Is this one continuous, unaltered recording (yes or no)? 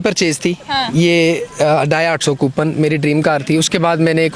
yes